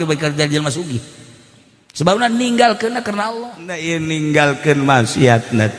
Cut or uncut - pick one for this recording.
cut